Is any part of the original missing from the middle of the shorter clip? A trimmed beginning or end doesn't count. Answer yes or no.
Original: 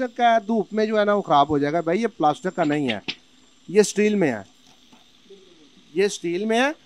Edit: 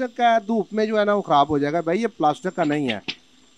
no